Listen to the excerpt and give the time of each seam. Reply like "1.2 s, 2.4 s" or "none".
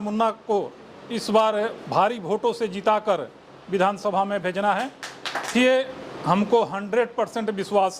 5.5 s